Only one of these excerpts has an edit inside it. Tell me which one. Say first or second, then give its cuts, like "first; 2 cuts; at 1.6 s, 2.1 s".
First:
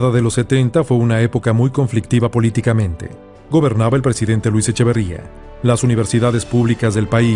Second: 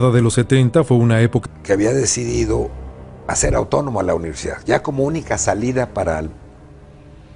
first; 1 cut; at 1.4 s